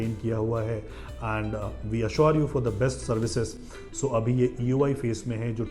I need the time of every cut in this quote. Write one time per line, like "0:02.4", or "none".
none